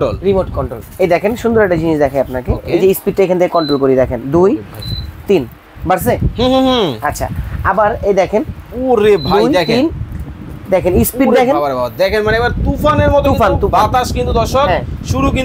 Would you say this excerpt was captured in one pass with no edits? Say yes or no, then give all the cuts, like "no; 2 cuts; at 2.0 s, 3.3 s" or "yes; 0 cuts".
yes; 0 cuts